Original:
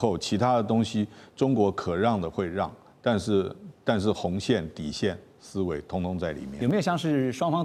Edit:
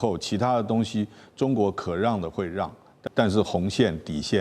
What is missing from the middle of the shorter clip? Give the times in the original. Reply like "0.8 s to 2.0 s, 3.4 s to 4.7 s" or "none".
2.9 s to 3.6 s